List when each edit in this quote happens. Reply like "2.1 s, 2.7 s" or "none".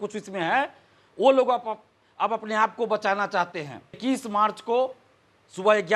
4.0 s

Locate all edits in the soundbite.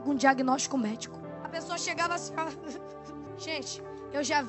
1.2 s, 3.3 s

